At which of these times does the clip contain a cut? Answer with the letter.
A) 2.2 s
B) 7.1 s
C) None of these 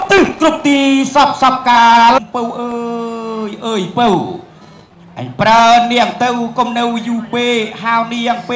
A